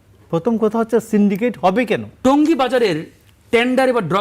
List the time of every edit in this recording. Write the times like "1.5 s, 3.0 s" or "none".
2.2 s